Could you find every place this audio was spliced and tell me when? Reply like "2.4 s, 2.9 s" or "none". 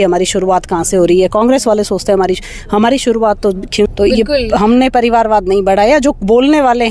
3.9 s